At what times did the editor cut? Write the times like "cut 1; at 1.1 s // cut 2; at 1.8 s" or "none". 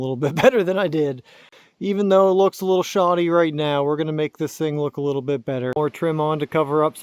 cut 1; at 1.6 s // cut 2; at 5.7 s